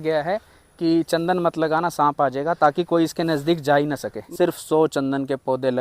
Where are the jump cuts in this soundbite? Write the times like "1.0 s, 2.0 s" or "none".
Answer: 4.2 s